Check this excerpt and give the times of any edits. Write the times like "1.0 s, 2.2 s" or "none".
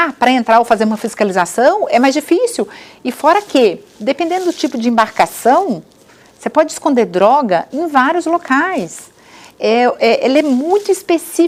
none